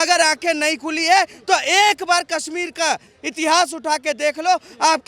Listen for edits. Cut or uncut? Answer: uncut